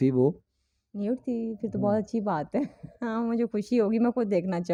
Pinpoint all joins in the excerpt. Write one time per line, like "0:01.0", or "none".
none